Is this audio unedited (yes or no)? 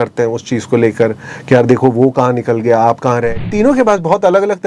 no